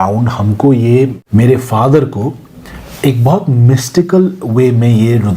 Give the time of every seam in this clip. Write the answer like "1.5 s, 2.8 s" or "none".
1.2 s